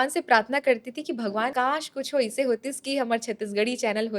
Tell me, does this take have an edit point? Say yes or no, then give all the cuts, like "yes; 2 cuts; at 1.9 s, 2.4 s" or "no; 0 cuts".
yes; 1 cut; at 1.5 s